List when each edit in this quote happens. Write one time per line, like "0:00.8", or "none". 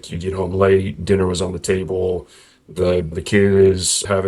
0:03.2